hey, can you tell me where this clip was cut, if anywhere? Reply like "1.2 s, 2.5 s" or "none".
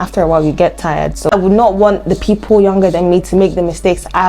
1.3 s

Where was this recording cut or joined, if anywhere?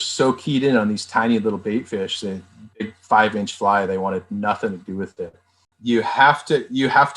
5.8 s

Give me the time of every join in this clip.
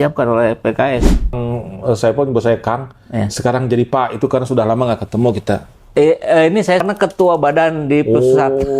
1.3 s, 6.8 s

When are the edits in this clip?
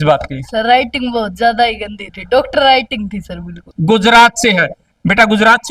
3.7 s

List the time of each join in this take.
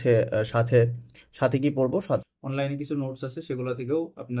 2.2 s

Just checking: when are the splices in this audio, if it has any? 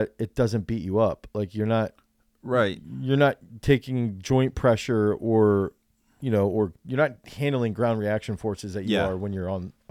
none

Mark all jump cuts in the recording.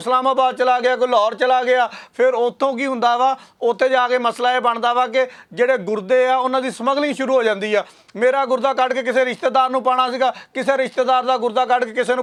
none

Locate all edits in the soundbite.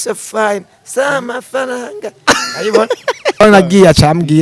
3.4 s

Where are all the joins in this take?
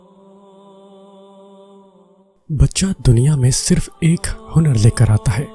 1.9 s

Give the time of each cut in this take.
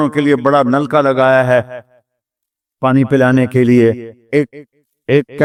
none

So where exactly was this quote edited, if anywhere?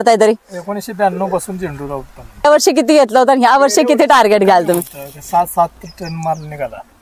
2.4 s

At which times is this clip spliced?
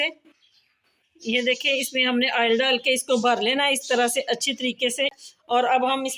5.2 s

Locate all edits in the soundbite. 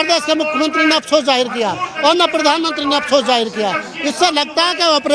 none

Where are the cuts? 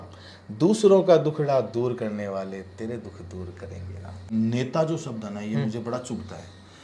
4.2 s

